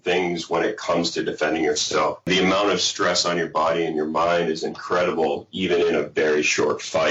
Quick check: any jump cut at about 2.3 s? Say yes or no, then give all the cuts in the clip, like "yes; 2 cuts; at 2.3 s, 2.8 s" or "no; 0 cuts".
yes; 1 cut; at 2.3 s